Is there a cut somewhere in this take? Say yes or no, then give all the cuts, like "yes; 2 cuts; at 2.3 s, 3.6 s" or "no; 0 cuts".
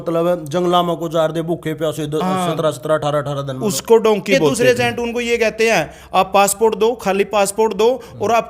yes; 1 cut; at 4.5 s